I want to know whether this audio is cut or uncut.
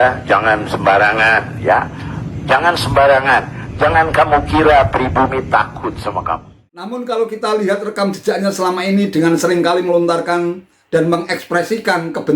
cut